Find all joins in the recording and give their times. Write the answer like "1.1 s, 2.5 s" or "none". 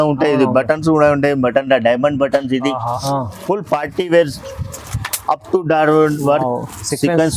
3.0 s